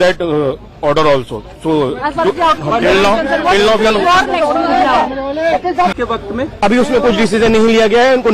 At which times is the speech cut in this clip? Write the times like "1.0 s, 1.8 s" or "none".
5.9 s